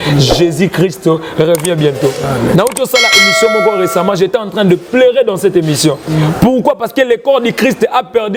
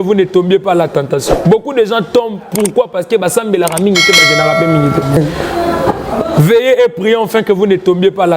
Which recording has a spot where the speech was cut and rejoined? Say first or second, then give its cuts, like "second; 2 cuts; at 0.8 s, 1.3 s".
second; 1 cut; at 5.2 s